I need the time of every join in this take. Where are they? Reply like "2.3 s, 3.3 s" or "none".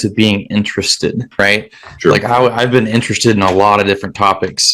1.3 s